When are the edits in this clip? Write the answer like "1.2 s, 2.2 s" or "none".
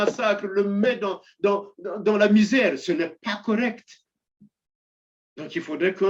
none